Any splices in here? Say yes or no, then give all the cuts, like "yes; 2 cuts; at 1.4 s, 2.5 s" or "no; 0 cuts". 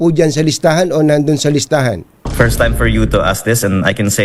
yes; 1 cut; at 2.2 s